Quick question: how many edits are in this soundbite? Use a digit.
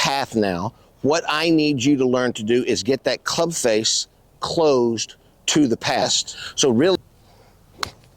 1